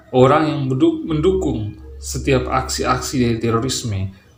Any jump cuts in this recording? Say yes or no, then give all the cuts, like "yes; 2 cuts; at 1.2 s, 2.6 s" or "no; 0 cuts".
no; 0 cuts